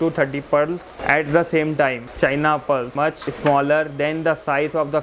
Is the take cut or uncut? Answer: cut